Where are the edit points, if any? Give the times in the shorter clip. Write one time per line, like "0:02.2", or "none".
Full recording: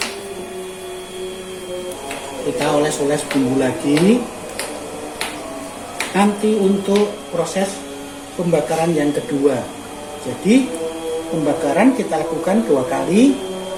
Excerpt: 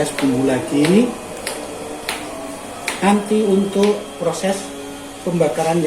none